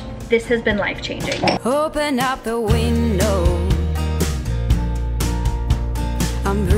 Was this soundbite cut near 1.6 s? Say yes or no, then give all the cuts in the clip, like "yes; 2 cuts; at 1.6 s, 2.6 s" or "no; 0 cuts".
yes; 1 cut; at 1.6 s